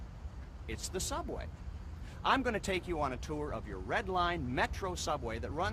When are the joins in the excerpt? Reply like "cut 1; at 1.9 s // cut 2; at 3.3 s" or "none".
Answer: cut 1; at 4.5 s